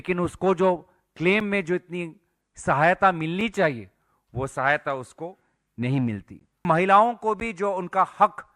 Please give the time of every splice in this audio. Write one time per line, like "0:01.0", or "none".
0:06.6